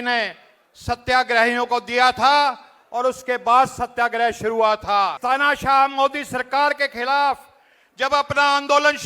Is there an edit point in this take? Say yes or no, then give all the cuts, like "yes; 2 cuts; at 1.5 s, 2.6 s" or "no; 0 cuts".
yes; 1 cut; at 5.2 s